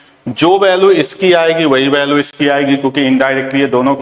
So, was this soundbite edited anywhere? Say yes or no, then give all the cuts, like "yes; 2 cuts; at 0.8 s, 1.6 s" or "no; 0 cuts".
no; 0 cuts